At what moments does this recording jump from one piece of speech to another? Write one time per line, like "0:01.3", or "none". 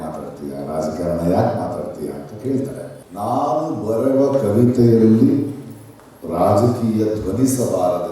0:03.0